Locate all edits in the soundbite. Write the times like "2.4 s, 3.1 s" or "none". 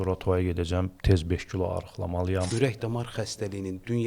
2.5 s